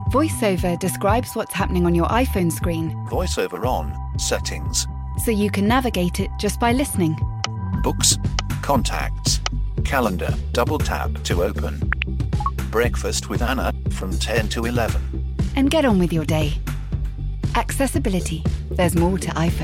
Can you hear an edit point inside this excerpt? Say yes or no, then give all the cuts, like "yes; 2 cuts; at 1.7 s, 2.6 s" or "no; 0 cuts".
no; 0 cuts